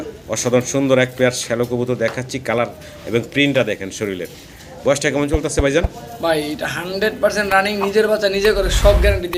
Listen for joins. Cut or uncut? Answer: uncut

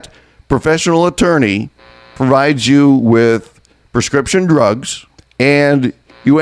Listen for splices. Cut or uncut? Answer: uncut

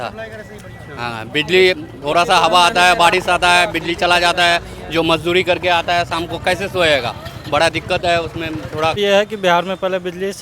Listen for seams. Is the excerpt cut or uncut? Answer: cut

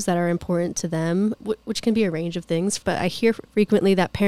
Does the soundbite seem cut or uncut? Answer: cut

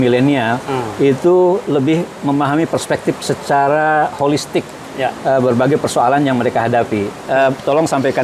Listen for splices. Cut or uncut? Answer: cut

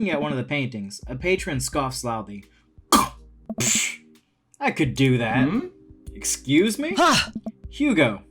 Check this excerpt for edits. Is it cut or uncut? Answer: uncut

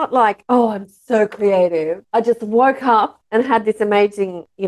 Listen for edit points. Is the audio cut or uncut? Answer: uncut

